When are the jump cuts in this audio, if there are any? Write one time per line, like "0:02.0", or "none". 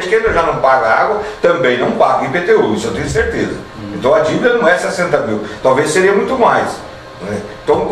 none